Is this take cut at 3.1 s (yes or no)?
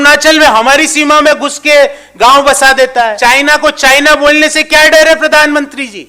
yes